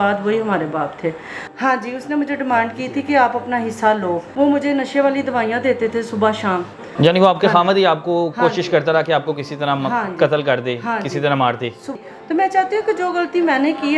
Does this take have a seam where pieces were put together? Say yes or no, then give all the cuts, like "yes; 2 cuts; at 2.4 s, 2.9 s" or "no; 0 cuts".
yes; 4 cuts; at 1.5 s, 4.3 s, 6.9 s, 11.9 s